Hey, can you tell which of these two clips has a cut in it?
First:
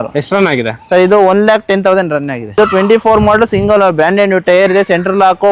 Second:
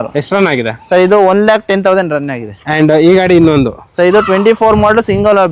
first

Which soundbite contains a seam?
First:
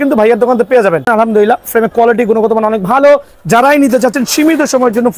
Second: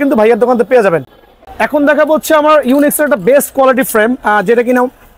first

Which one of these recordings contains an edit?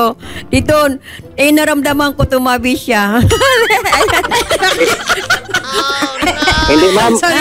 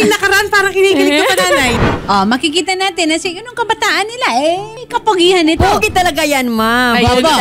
second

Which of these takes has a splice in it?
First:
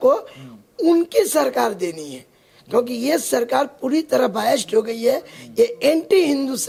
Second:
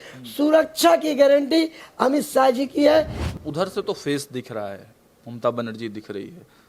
second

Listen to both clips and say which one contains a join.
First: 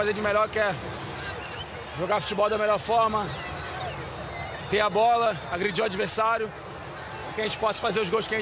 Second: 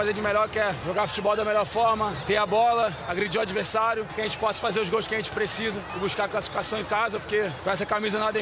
second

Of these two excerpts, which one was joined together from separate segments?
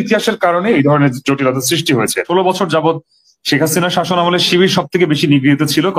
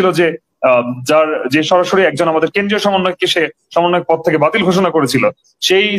first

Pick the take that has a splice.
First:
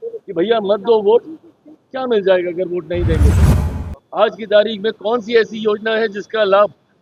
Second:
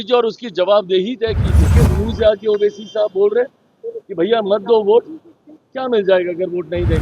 second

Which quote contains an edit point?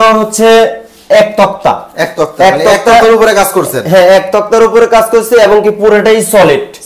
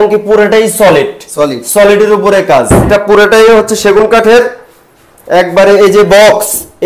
second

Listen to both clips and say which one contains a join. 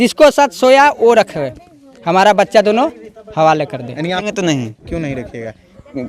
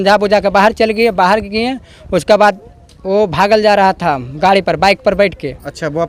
first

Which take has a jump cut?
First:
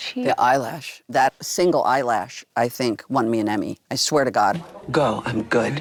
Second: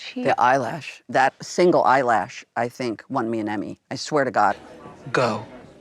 second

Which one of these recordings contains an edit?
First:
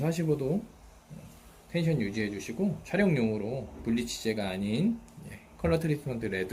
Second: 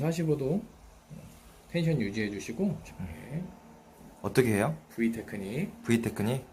second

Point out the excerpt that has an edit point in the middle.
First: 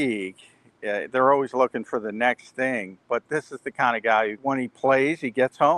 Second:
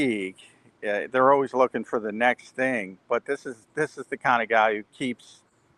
first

